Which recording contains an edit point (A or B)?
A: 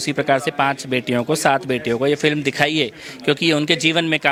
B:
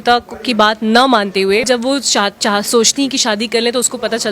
B